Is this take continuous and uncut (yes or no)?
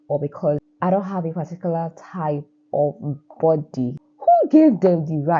no